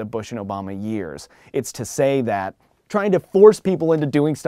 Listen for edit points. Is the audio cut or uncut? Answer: cut